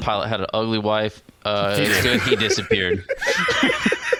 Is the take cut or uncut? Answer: uncut